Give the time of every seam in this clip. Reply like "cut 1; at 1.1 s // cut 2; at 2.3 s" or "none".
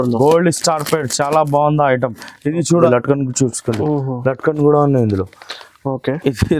cut 1; at 2.9 s